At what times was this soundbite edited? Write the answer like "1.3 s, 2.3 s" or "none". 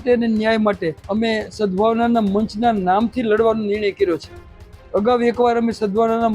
1.0 s